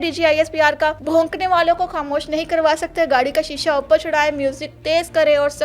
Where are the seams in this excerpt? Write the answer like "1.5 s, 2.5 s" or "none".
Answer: 1.0 s

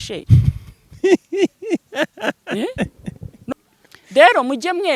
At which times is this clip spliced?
3.5 s

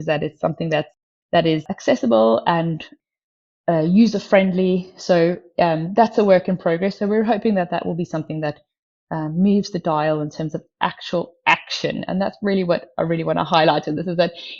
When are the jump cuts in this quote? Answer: 0.9 s, 1.7 s

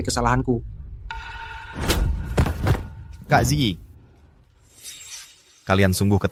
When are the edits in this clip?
none

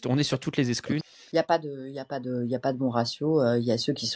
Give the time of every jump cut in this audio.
1.0 s

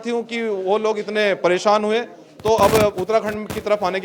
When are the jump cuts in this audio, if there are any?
none

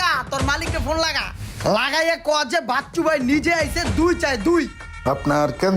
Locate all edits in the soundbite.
4.8 s

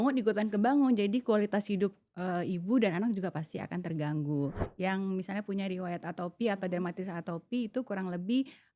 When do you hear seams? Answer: 4.8 s

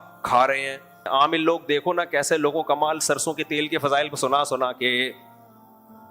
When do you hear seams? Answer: 1.0 s, 5.2 s

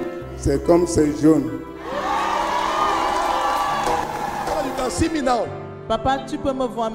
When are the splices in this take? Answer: 4.7 s

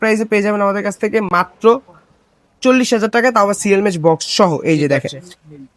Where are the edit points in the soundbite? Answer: none

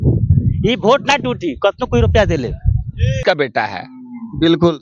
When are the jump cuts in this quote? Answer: 3.2 s

